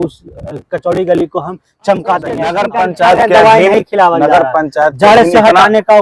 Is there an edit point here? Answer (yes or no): yes